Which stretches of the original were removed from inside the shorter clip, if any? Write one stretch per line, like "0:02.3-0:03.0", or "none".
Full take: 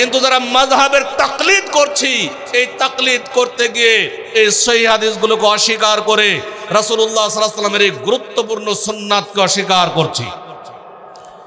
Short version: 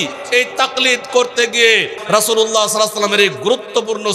0:04.2-0:06.6